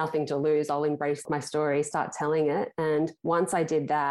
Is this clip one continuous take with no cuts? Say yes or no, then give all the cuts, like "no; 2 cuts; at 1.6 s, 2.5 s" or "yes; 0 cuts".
no; 2 cuts; at 1.2 s, 3.2 s